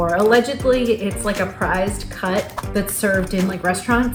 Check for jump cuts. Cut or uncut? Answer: uncut